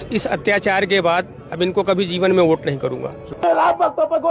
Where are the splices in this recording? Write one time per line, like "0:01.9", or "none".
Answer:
0:03.3

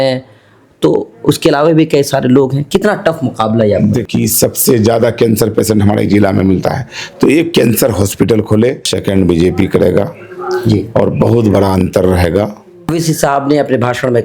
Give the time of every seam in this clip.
0:04.0
0:08.9
0:12.9

